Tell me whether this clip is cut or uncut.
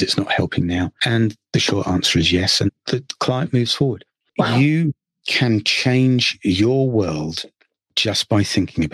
cut